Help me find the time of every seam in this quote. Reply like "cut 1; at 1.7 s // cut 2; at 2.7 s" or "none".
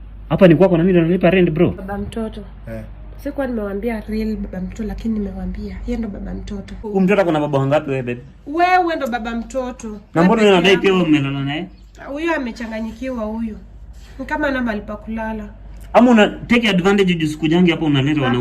cut 1; at 1.8 s // cut 2; at 6.8 s

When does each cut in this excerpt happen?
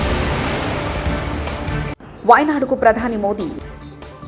cut 1; at 2.0 s

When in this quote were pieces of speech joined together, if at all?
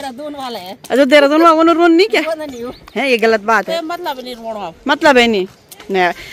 cut 1; at 3.7 s

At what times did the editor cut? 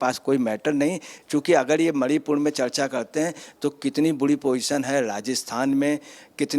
none

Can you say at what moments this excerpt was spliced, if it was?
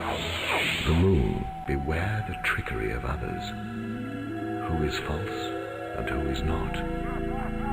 cut 1; at 1.0 s

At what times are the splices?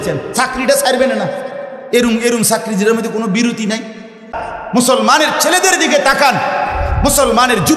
cut 1; at 4.4 s

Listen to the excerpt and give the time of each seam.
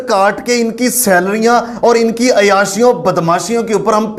none

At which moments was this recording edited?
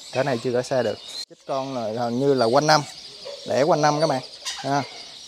cut 1; at 1.2 s

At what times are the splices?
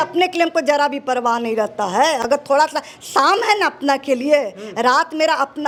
none

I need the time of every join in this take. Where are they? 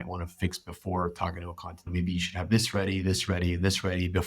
cut 1; at 1.9 s

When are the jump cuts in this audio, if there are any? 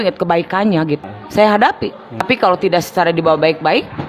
cut 1; at 1.0 s // cut 2; at 2.2 s

